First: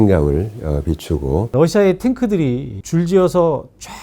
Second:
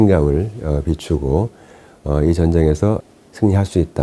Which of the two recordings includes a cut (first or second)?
first